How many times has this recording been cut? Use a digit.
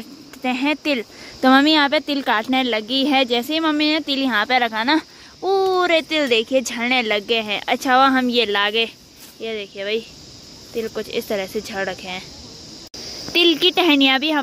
0